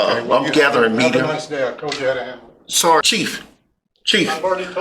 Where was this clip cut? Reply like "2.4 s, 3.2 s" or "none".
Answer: 3.0 s

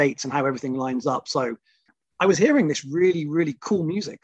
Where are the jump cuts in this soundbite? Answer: 2.0 s

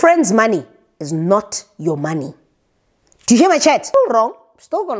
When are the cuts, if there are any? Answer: 3.9 s

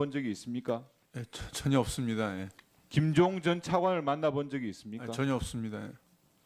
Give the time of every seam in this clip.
2.6 s

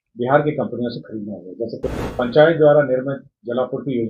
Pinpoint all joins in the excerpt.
1.8 s

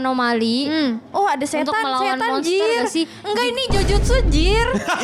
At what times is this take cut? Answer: 1.0 s

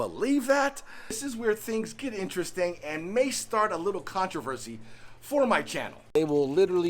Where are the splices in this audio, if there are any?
1.2 s, 6.0 s

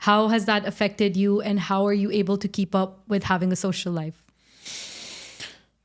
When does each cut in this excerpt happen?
none

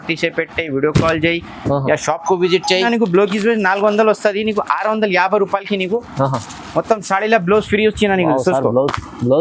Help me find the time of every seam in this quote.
2.9 s

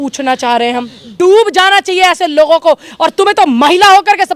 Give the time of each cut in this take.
1.0 s

